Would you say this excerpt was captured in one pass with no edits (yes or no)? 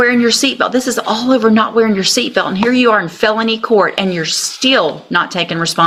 yes